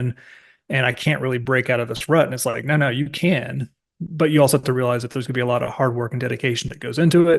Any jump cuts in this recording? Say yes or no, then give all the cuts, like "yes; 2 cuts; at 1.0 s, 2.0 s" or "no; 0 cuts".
no; 0 cuts